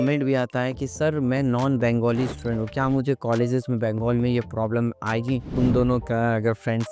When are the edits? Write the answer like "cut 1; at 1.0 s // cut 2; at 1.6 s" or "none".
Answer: cut 1; at 5.5 s

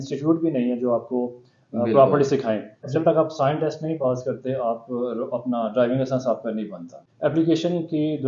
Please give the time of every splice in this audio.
cut 1; at 2.8 s // cut 2; at 7.0 s

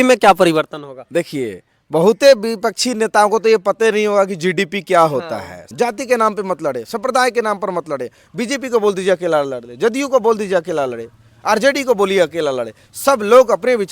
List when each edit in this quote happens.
cut 1; at 5.6 s

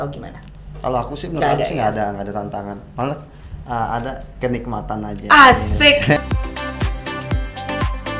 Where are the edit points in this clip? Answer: cut 1; at 6.2 s

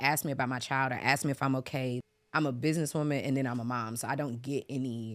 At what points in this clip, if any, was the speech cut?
cut 1; at 2.1 s

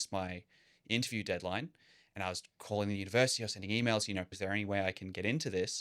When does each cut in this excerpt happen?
cut 1; at 4.3 s

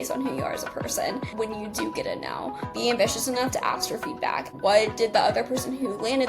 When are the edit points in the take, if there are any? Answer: cut 1; at 1.3 s // cut 2; at 2.8 s // cut 3; at 4.5 s

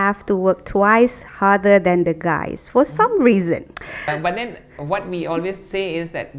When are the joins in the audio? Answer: cut 1; at 4.1 s

